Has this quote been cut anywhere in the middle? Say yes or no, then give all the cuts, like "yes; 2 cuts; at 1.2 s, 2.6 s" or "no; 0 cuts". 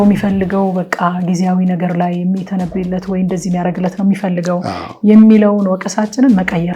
no; 0 cuts